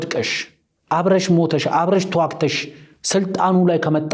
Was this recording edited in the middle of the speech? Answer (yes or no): no